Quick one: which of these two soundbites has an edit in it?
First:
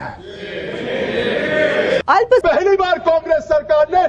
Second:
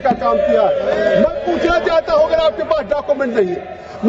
first; 1 cut; at 2.1 s

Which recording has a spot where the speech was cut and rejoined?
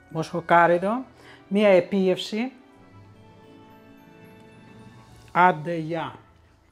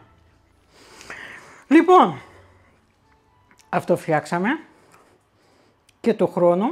first; 2 cuts; at 2.6 s, 5.2 s

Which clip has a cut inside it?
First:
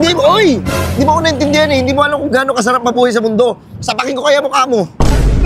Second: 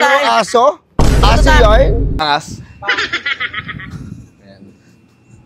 second; 1 cut; at 2.2 s

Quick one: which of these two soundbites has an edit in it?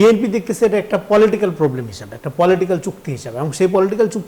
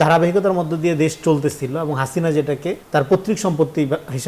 second; 1 cut; at 2.8 s

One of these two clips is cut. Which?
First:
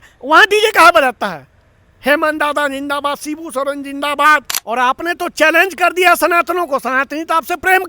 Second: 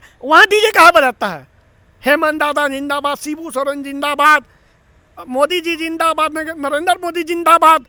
first; 1 cut; at 4.5 s

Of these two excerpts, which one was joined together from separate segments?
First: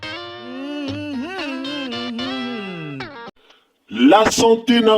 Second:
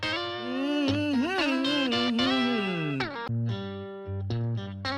first; 1 cut; at 3.1 s

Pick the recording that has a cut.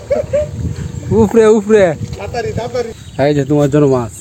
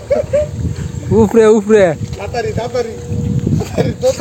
first; 1 cut; at 3.0 s

